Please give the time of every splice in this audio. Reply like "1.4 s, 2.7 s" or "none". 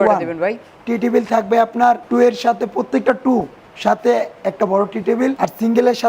2.0 s, 5.4 s